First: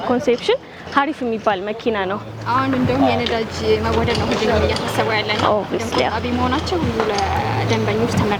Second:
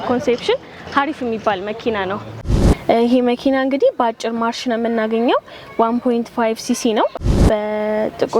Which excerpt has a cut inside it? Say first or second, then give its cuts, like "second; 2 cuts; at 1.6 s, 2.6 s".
second; 2 cuts; at 2.4 s, 7.4 s